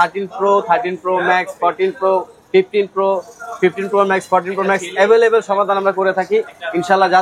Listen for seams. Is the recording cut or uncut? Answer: uncut